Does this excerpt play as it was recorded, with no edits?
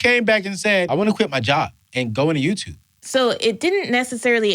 no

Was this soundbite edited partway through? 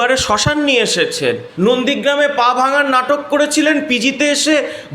yes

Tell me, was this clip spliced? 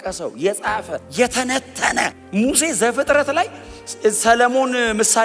yes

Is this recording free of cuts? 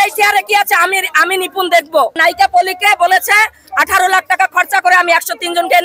no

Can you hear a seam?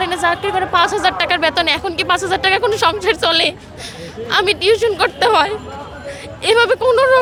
no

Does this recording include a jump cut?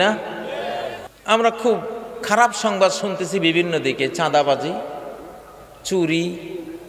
yes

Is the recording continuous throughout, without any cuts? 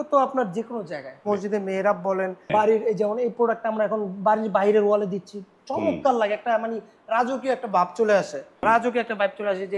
no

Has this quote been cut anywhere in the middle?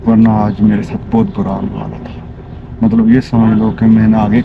no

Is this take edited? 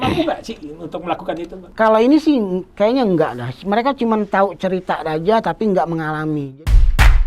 yes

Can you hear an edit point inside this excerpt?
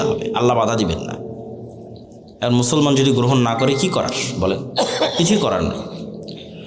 no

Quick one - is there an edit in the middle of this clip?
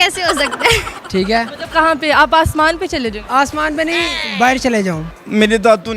yes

